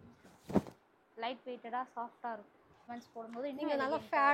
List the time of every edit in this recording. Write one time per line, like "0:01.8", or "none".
0:02.9